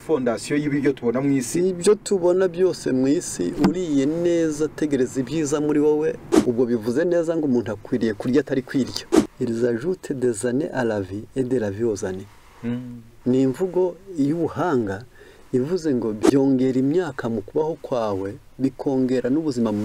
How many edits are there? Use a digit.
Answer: 3